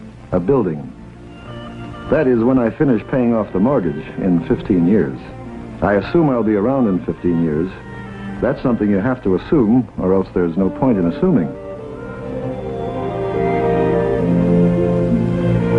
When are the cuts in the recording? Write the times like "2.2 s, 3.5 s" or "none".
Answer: none